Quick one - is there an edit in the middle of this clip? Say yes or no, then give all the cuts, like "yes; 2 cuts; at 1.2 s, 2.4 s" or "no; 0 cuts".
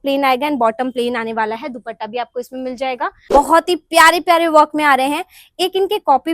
yes; 1 cut; at 3.2 s